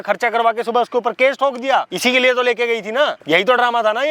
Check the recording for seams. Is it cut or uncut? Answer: cut